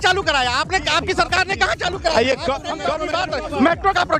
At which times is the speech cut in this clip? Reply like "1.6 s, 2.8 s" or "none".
2.9 s